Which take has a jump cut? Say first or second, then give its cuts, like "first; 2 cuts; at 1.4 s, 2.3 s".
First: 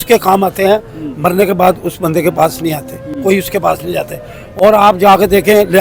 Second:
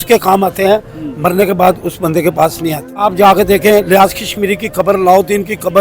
second; 1 cut; at 3.0 s